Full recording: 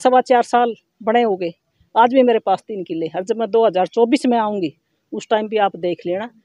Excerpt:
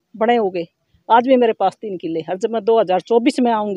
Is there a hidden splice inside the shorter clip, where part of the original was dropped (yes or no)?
no